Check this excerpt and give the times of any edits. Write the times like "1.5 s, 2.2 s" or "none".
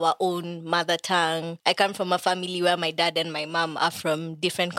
1.5 s